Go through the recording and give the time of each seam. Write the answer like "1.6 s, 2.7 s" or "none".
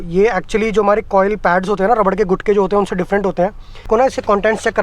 3.8 s